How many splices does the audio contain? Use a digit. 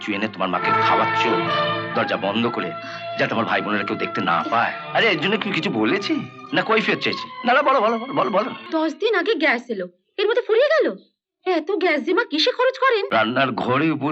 3